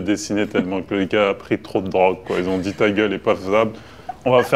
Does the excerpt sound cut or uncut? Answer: uncut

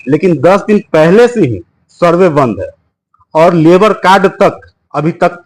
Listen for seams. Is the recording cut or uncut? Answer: uncut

